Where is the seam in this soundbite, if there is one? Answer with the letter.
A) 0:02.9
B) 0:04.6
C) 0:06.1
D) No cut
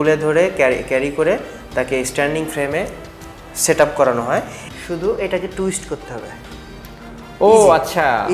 B